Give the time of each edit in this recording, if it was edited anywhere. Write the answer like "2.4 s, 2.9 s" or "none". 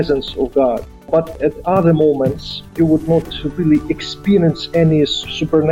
1.0 s, 2.8 s